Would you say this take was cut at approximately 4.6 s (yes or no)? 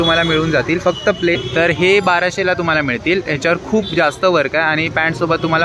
no